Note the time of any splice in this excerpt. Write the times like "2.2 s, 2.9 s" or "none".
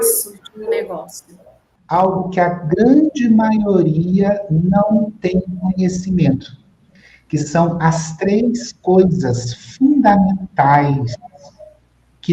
1.8 s